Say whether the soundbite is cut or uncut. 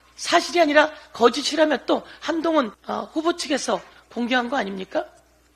cut